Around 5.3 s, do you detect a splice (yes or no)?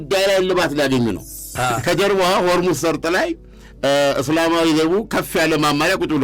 no